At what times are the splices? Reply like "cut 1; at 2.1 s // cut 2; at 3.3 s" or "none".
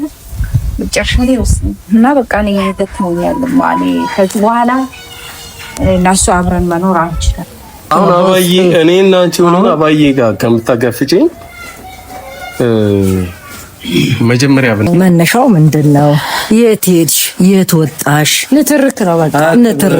cut 1; at 7.9 s // cut 2; at 14.9 s